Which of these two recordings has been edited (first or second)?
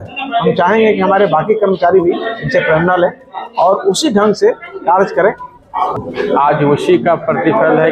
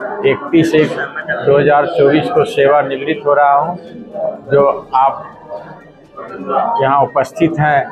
first